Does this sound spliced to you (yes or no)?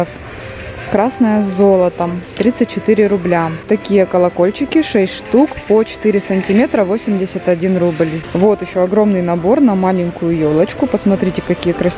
yes